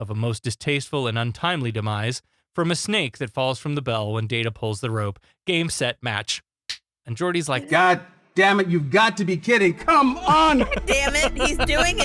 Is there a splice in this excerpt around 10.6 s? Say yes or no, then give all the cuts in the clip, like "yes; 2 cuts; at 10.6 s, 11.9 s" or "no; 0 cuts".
yes; 2 cuts; at 7.4 s, 10.6 s